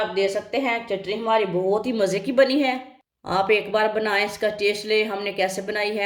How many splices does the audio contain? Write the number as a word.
zero